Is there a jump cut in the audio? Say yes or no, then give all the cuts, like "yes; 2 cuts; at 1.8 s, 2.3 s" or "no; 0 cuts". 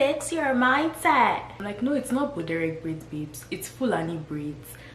yes; 1 cut; at 1.6 s